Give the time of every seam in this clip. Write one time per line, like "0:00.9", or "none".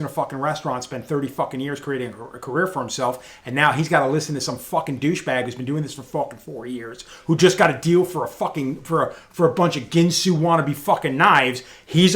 none